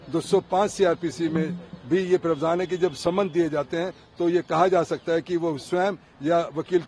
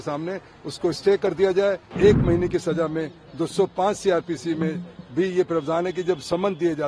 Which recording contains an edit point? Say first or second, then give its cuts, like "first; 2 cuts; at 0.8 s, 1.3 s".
second; 1 cut; at 1.9 s